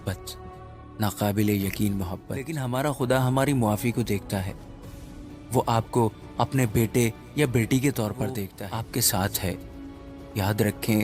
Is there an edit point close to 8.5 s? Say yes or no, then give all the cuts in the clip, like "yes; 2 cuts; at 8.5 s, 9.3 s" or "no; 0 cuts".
yes; 2 cuts; at 2.5 s, 8.5 s